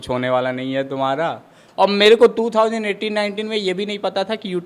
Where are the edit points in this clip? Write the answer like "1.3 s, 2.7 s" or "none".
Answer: 1.6 s